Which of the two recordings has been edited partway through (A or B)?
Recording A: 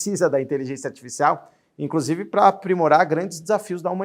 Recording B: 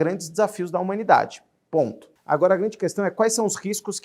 B